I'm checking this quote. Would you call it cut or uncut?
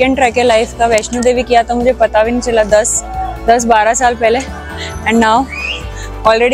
uncut